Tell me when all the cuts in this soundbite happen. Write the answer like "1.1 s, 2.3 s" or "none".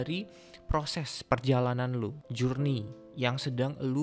2.2 s, 3.0 s